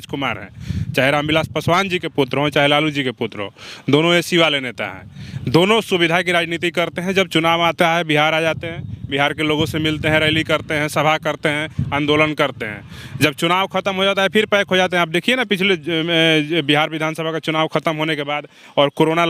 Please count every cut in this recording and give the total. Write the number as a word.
zero